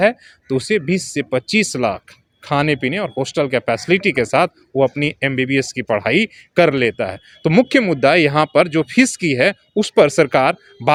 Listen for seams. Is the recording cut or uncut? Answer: uncut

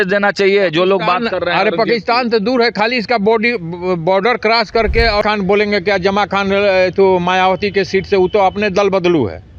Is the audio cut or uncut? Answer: cut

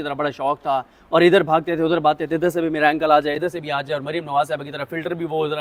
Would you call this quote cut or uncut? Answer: uncut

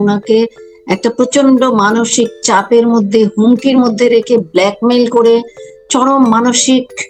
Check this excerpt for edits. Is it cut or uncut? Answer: uncut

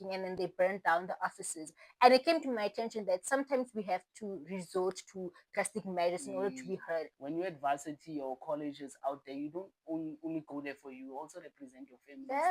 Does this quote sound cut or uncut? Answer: cut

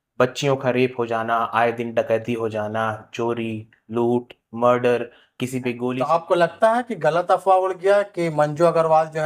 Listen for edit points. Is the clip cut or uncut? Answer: cut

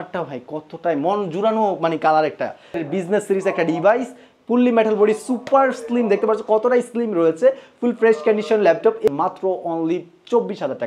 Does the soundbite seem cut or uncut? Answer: cut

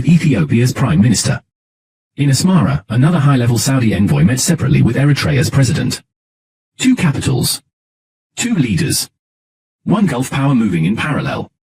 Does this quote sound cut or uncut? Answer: uncut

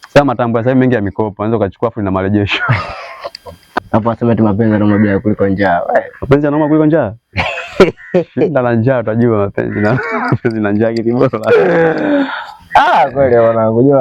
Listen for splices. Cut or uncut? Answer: cut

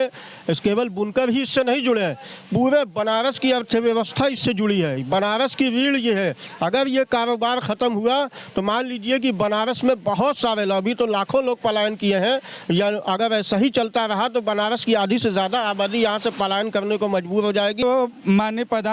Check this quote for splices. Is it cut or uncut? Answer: cut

